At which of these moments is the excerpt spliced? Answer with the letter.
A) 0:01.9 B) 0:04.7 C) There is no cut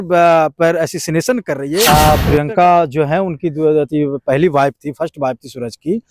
A